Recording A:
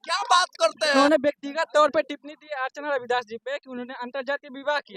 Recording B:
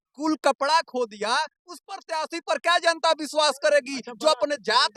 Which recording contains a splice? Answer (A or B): A